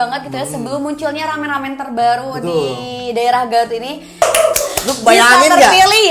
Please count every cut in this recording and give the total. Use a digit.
1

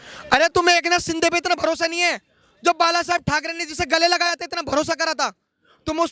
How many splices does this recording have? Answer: 0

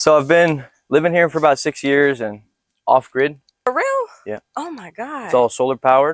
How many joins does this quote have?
1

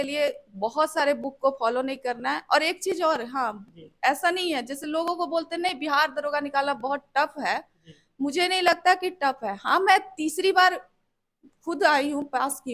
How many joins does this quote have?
0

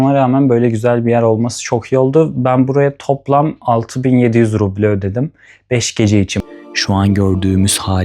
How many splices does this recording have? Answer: 1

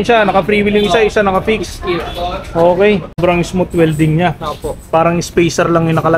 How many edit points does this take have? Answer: 1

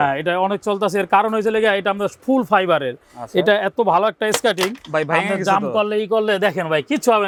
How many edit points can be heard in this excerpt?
0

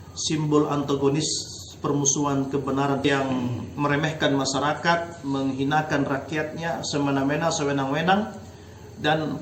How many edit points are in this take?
1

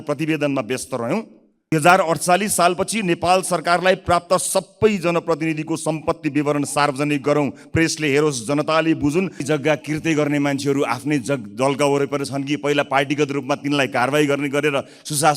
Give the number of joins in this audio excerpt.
2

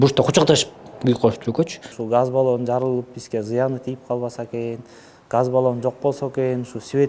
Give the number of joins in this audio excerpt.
1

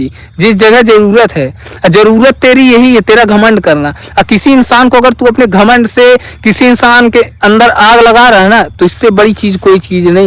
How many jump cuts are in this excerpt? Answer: 0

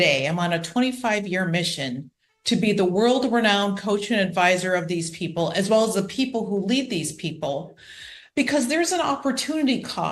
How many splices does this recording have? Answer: 0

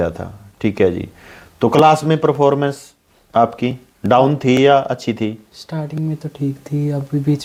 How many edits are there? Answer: 0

